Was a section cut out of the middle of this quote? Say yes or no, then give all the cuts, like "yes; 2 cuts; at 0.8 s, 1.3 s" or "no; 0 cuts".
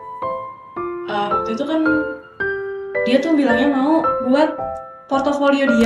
no; 0 cuts